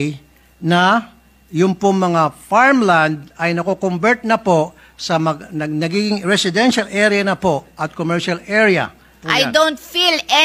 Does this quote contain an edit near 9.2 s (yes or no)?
yes